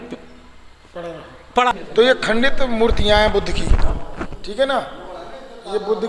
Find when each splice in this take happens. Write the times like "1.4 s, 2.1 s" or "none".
1.7 s